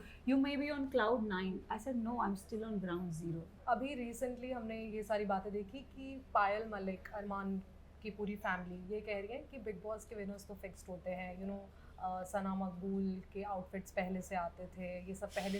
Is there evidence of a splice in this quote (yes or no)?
yes